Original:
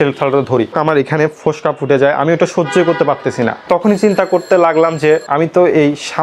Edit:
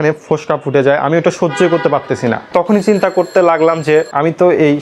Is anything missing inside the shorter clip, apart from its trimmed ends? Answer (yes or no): no